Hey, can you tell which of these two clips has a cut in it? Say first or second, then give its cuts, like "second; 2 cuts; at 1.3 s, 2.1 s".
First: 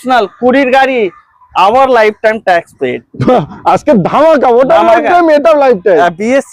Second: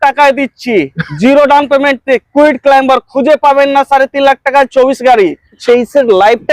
second; 1 cut; at 5.6 s